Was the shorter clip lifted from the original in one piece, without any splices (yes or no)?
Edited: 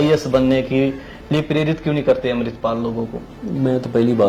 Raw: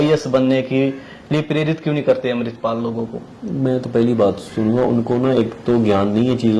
yes